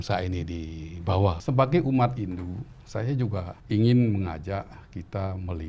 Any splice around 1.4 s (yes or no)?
yes